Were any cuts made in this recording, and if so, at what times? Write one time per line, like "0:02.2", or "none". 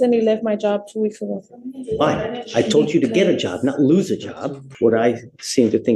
0:04.6